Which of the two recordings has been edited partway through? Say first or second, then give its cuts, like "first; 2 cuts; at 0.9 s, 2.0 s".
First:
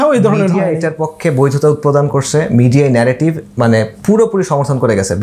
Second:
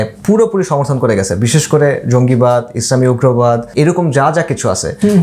second; 1 cut; at 3.7 s